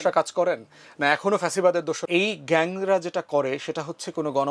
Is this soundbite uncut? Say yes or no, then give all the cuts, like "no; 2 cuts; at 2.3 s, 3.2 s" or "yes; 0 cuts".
no; 1 cut; at 2.0 s